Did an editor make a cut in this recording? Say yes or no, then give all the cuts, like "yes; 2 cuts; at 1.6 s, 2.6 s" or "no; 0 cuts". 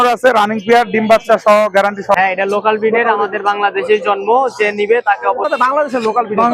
yes; 2 cuts; at 2.1 s, 5.5 s